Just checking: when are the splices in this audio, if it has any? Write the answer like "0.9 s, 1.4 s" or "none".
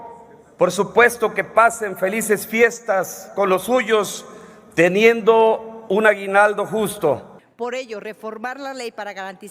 7.4 s